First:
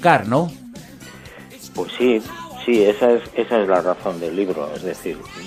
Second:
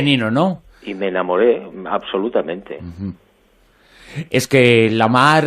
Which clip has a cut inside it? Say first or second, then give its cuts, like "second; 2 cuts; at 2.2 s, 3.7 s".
second; 1 cut; at 1.7 s